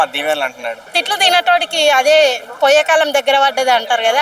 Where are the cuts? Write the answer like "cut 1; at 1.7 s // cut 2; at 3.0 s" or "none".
cut 1; at 1.0 s